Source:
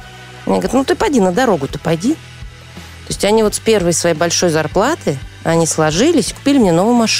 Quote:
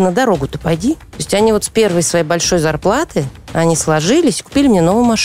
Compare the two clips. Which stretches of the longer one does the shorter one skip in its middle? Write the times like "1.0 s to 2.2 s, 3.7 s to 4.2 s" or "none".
2.3 s to 3.0 s